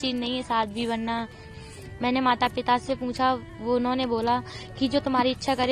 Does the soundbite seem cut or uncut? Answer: cut